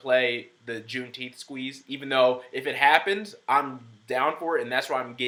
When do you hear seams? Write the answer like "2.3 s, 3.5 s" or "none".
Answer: none

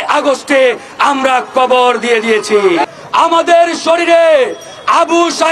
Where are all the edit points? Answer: 2.8 s

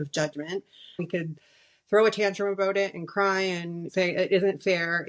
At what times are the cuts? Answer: 1.0 s

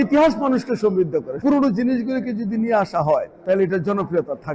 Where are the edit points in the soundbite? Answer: 1.4 s, 3.3 s

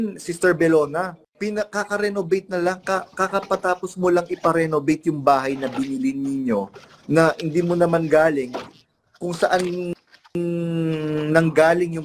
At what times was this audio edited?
1.2 s

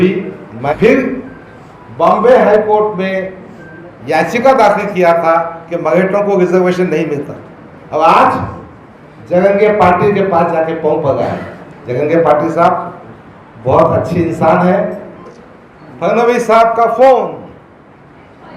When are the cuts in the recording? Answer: 0.7 s, 15.3 s

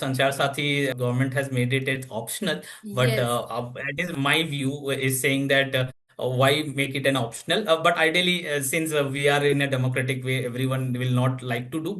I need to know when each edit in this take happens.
0.9 s

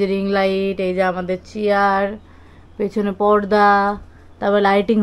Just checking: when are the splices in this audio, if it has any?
none

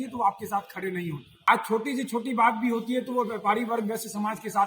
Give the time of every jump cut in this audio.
1.5 s

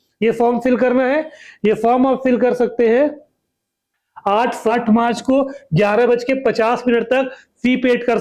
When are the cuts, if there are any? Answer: 4.7 s

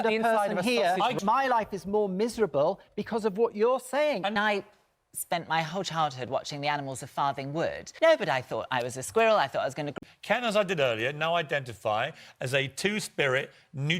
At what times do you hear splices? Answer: 1.2 s, 4.4 s, 7.9 s, 9.9 s

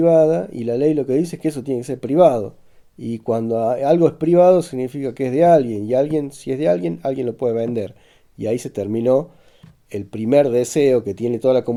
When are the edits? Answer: none

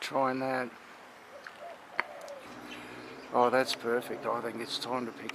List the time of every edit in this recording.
2.5 s

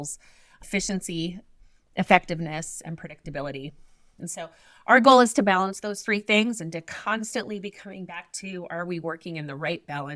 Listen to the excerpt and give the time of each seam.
4.1 s

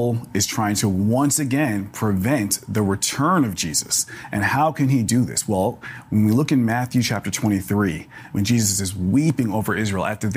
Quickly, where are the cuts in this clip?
4.2 s

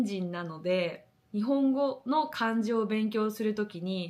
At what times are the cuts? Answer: 1.2 s

